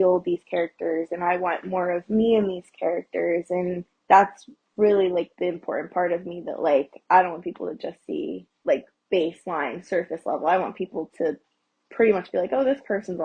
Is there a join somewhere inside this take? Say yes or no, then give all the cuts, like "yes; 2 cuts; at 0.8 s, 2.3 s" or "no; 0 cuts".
yes; 2 cuts; at 3.9 s, 8.5 s